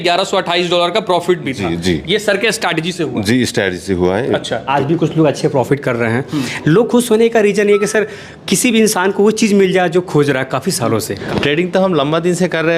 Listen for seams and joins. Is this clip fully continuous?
no; 2 cuts; at 4.7 s, 11.2 s

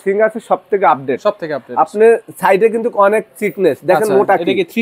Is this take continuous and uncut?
yes; 0 cuts

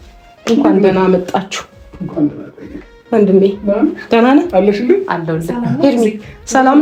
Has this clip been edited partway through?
no; 0 cuts

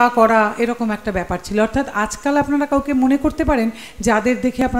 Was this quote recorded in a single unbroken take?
yes; 0 cuts

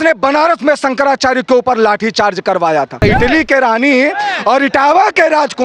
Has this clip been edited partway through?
yes; 1 cut; at 3.0 s

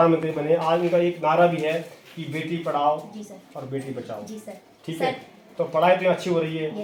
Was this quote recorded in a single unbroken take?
yes; 0 cuts

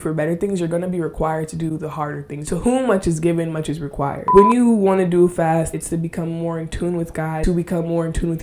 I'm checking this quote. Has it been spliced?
yes; 4 cuts; at 2.4 s, 4.2 s, 5.7 s, 7.4 s

